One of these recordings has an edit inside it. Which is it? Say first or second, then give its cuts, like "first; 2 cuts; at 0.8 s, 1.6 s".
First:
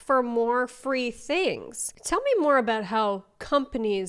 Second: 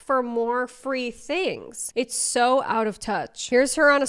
first; 1 cut; at 1.8 s